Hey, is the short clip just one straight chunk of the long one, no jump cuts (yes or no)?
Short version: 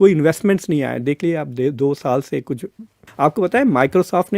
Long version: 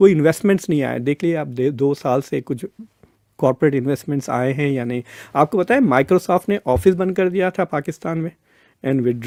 no